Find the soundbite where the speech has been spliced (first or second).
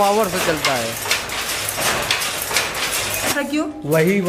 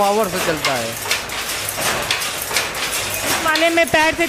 first